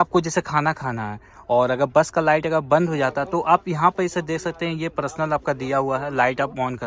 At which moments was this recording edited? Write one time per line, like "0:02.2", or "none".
none